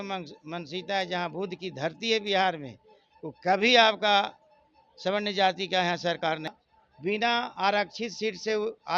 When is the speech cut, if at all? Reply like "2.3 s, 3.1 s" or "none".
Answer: 6.5 s